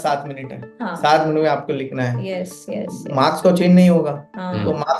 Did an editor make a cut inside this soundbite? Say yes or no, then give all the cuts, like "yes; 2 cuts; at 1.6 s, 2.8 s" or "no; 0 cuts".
no; 0 cuts